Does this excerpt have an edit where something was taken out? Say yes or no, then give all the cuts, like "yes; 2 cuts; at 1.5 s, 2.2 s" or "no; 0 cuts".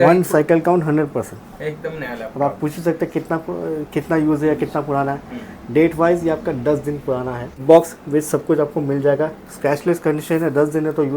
yes; 1 cut; at 7.6 s